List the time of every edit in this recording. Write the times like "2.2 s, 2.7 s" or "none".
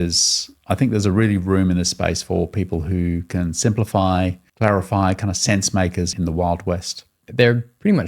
4.4 s, 6.1 s, 7.2 s